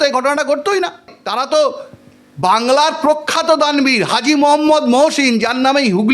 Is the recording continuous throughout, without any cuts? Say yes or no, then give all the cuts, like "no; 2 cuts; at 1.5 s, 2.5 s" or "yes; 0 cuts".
no; 1 cut; at 1.1 s